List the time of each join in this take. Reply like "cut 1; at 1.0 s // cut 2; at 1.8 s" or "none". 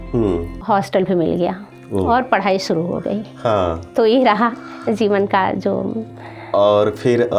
none